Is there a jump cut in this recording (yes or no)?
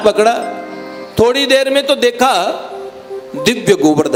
no